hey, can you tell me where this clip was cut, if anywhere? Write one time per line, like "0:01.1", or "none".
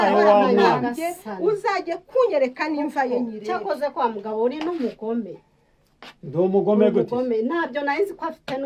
none